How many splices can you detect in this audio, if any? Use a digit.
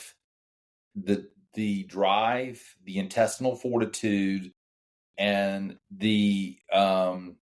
1